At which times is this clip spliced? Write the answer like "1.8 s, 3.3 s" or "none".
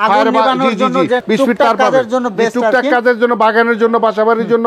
1.2 s